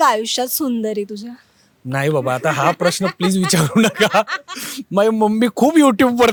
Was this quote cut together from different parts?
no; 0 cuts

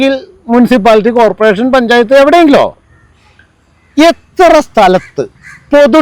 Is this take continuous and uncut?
yes; 0 cuts

